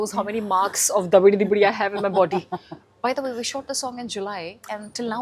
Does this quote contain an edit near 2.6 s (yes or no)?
no